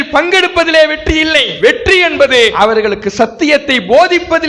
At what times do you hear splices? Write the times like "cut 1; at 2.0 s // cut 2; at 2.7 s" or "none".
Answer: cut 1; at 1.5 s // cut 2; at 2.5 s